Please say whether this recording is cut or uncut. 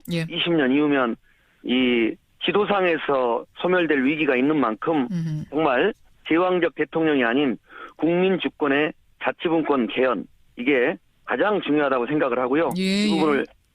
cut